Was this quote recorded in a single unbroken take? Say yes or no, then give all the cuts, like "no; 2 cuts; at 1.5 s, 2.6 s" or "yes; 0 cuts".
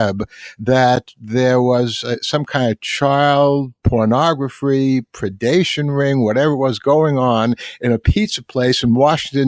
no; 1 cut; at 3.8 s